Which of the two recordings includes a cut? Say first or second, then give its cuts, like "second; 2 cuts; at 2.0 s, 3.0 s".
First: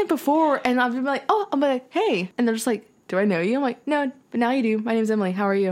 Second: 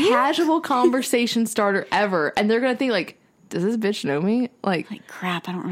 first; 1 cut; at 2.3 s